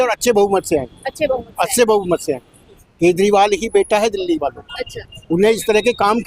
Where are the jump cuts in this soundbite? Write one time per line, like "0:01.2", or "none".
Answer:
0:02.8